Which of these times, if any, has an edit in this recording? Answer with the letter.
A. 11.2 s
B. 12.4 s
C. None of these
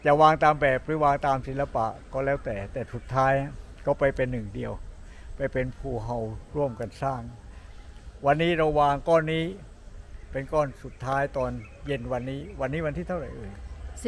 C